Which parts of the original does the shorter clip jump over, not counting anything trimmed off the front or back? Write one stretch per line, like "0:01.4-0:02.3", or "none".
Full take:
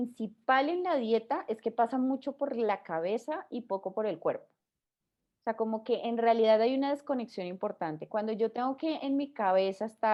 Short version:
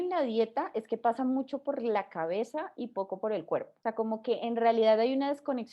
0:04.5-0:05.3